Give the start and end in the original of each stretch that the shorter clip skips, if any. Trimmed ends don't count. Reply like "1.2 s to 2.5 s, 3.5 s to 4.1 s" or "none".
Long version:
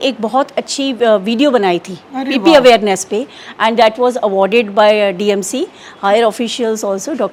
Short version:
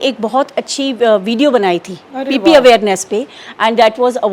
none